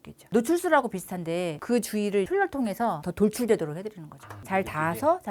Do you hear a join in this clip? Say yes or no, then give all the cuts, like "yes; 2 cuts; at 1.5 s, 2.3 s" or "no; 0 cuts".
no; 0 cuts